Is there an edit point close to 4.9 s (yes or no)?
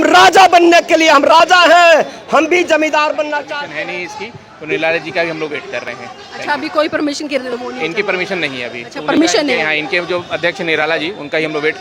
no